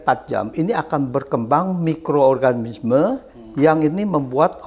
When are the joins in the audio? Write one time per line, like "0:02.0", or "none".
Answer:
none

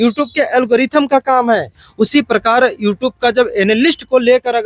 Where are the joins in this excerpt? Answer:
0:01.8

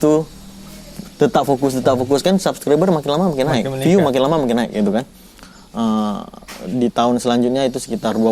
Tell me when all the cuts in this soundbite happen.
none

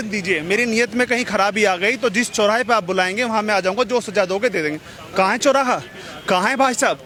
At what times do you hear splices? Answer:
none

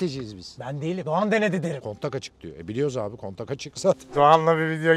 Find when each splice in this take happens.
0:01.8
0:04.1

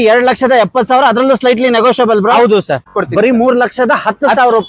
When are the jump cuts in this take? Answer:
0:02.9

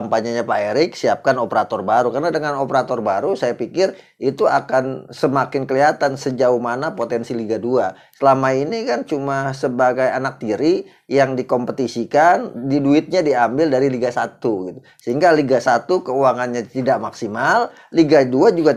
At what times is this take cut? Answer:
none

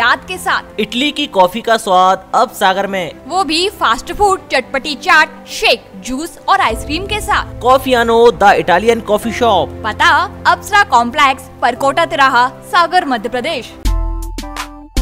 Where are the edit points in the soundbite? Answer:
0:13.7

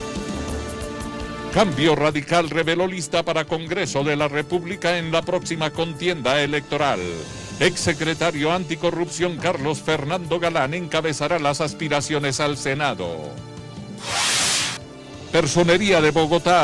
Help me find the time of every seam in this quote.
none

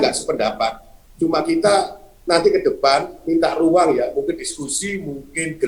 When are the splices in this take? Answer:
none

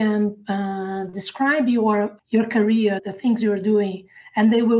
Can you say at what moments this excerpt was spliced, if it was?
0:02.2
0:03.1

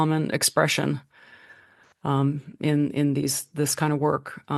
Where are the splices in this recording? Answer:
none

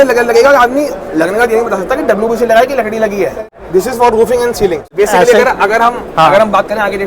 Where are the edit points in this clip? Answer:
0:03.4
0:04.9

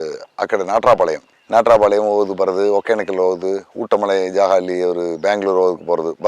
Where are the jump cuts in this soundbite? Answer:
none

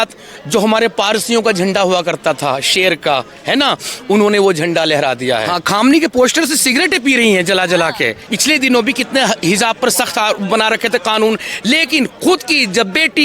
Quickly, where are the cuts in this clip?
0:05.5
0:08.3

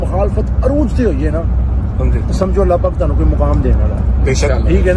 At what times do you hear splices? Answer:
none

